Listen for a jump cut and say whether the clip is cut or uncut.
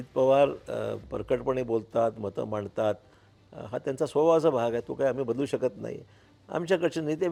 uncut